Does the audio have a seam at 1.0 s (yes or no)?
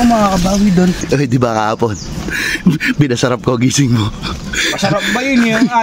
yes